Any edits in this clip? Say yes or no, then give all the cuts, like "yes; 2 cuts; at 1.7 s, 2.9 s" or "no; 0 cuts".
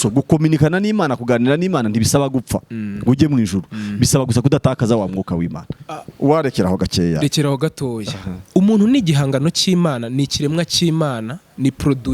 no; 0 cuts